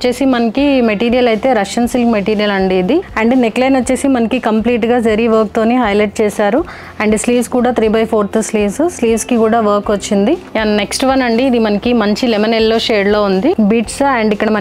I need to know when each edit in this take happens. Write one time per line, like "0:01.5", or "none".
0:03.1
0:10.5
0:13.6